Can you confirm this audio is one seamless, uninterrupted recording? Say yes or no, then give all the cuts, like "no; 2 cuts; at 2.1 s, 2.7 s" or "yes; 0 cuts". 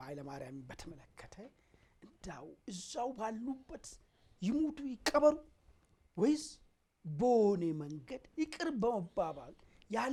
yes; 0 cuts